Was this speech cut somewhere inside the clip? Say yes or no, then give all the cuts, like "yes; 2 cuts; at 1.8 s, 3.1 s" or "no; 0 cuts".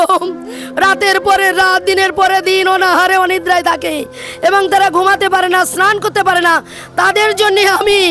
no; 0 cuts